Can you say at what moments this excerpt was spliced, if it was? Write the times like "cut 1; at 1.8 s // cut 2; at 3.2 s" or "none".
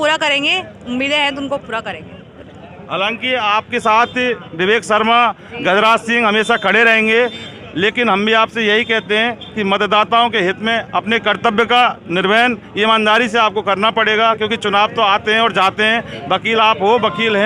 none